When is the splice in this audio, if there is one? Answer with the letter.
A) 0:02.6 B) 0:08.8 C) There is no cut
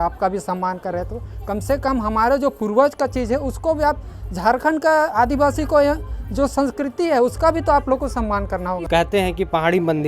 B